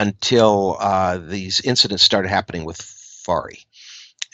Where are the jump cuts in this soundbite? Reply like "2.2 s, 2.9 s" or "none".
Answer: none